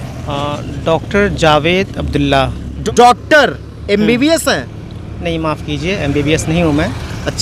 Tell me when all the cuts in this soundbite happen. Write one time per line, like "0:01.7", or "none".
0:02.6